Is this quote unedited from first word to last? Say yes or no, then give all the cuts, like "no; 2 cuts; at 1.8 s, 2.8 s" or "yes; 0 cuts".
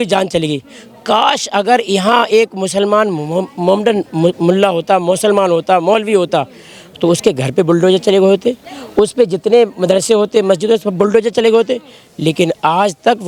yes; 0 cuts